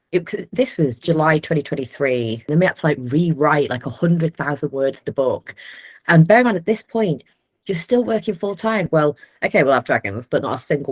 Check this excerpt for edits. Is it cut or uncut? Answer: cut